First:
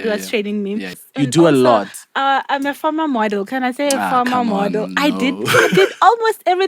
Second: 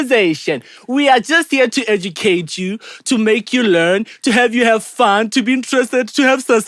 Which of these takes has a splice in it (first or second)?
first